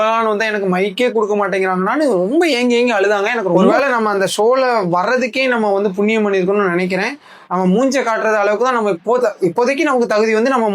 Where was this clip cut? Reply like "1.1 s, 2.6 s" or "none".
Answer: 3.7 s